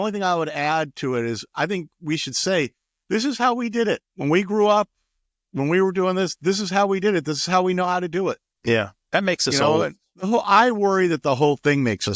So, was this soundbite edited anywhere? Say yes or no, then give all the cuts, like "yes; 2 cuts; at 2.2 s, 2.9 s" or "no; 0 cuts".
yes; 2 cuts; at 4.1 s, 10.1 s